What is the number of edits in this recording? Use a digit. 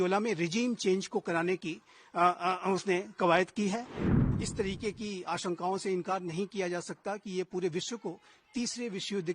1